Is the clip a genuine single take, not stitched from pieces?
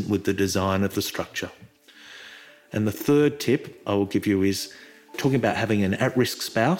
no; 1 cut; at 5.2 s

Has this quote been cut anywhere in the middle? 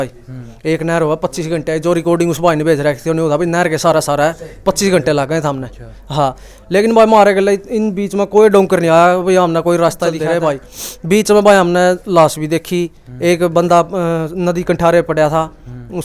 yes; 1 cut; at 10.2 s

